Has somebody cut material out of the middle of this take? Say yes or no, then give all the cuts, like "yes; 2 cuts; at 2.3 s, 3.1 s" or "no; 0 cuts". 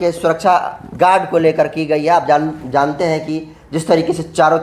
no; 0 cuts